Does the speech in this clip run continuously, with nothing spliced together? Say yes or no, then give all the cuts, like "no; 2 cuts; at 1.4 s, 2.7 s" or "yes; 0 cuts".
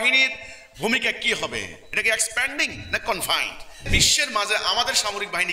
no; 1 cut; at 3.9 s